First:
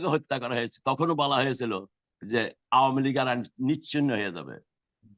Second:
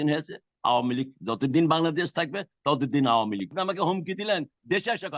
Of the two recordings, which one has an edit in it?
second; 1 cut; at 3.5 s

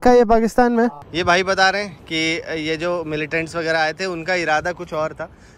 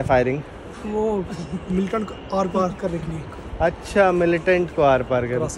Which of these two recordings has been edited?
first; 1 cut; at 1.1 s

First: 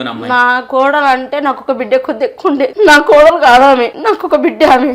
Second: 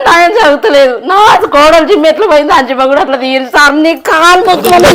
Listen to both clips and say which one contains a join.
first; 2 cuts; at 2.7 s, 3.9 s

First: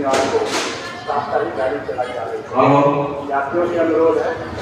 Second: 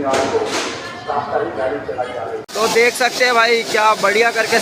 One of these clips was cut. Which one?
second; 1 cut; at 2.5 s

